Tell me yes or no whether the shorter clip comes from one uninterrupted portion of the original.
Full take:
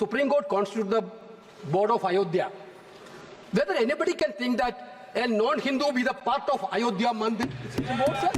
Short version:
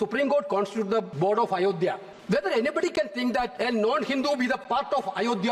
no